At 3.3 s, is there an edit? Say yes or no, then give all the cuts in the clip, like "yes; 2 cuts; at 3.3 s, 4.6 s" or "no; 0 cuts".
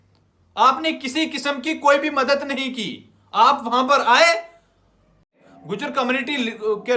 no; 1 cut; at 5.4 s